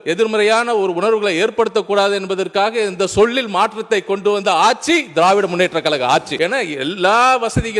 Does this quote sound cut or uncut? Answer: cut